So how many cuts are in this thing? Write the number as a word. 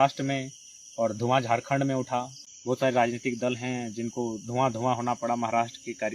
one